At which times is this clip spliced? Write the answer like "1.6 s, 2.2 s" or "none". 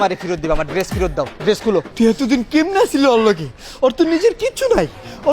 1.9 s